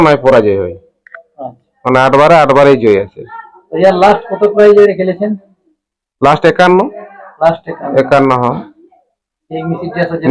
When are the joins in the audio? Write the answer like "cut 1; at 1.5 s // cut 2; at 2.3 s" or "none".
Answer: none